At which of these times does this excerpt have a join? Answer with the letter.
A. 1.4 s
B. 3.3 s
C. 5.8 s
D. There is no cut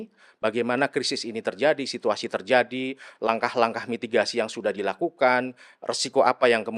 D